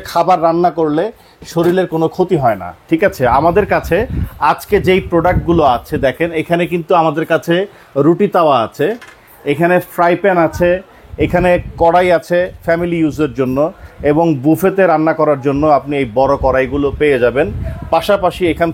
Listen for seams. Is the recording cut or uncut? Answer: uncut